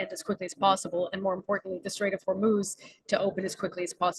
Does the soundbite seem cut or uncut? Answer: uncut